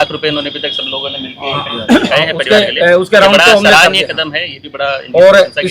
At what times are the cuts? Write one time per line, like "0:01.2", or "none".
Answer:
none